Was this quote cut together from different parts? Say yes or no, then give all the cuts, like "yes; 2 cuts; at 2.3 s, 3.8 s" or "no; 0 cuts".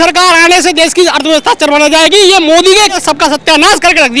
yes; 1 cut; at 3.0 s